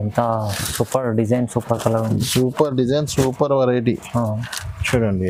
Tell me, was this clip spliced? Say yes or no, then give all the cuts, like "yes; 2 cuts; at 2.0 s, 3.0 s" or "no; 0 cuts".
no; 0 cuts